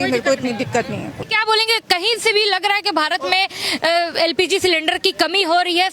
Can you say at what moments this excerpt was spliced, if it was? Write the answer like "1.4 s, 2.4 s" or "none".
1.2 s